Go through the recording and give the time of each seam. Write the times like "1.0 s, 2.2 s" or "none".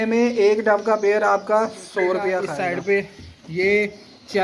2.5 s